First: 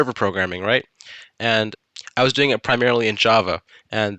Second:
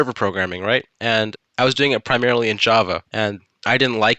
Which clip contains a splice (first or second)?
second